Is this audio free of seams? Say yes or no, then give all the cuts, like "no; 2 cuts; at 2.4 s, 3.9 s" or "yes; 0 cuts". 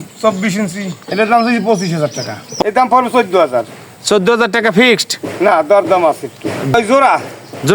no; 3 cuts; at 1.0 s, 2.4 s, 6.7 s